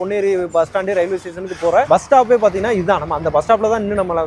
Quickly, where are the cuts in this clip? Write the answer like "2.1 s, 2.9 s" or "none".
none